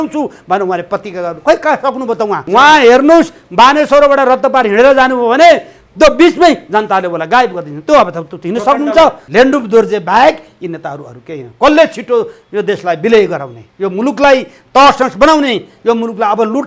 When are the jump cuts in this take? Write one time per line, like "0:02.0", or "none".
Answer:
0:02.4
0:09.2